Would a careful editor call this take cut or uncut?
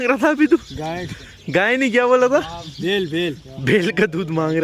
uncut